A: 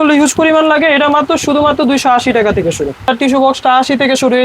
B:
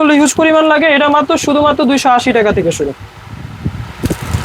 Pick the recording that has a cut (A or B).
A